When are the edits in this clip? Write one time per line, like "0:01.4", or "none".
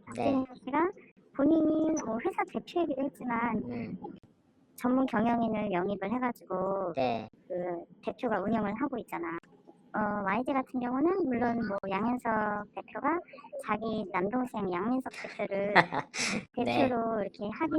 0:04.1
0:09.4